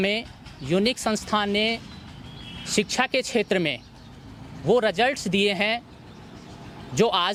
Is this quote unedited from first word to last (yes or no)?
yes